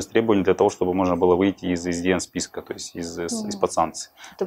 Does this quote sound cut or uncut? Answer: uncut